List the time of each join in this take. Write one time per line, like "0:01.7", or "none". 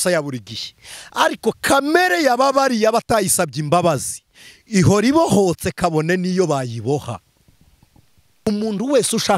0:08.5